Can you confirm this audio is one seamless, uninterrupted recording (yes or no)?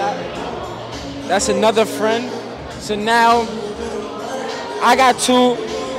yes